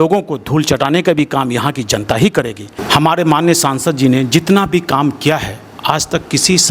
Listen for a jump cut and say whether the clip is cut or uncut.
cut